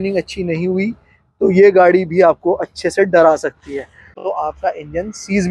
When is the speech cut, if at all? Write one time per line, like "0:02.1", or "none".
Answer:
0:04.2